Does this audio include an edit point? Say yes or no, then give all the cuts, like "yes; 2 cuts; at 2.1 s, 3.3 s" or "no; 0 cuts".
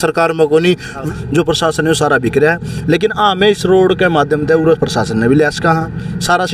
yes; 1 cut; at 1.0 s